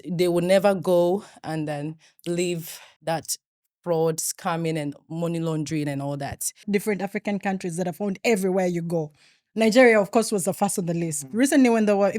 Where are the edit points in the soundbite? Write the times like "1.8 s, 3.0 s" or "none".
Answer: 6.6 s